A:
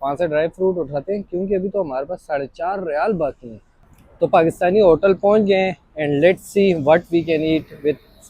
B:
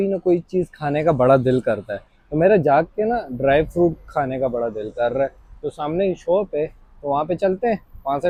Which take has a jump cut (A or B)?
A